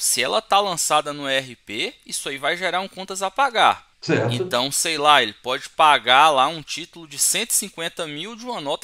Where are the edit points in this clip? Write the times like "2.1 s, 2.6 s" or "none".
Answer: 3.9 s